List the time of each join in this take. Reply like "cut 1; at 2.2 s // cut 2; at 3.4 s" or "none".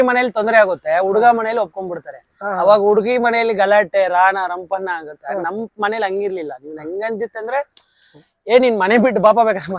none